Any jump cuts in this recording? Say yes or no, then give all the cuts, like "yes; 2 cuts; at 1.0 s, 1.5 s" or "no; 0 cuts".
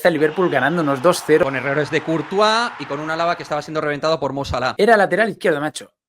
yes; 2 cuts; at 1.4 s, 4.7 s